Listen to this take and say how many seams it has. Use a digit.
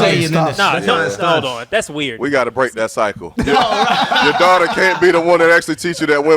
1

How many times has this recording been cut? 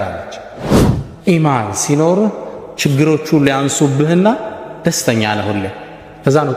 0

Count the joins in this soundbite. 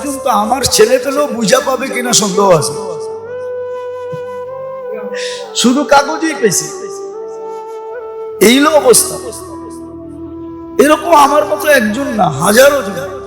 7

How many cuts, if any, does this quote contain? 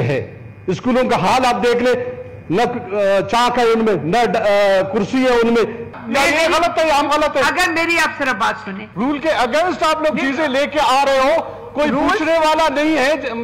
2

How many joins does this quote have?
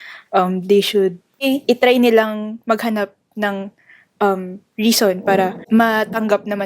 2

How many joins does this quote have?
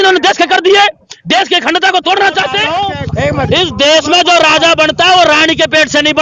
1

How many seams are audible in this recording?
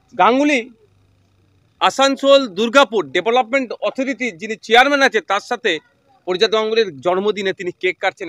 0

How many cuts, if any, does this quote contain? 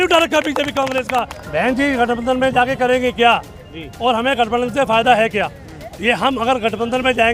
1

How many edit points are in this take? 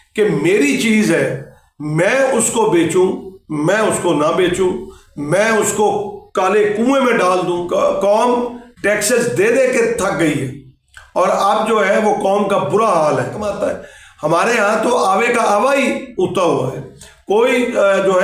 2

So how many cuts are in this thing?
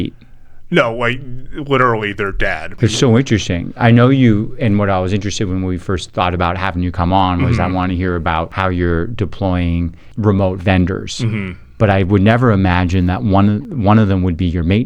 4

